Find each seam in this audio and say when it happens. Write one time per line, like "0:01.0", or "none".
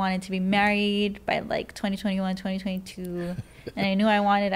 none